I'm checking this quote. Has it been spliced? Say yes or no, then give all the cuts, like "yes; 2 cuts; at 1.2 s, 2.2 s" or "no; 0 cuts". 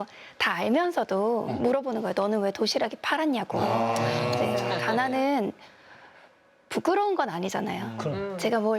yes; 1 cut; at 4.8 s